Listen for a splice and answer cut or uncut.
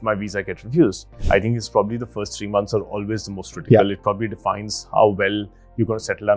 cut